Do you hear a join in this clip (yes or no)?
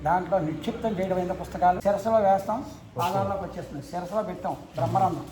yes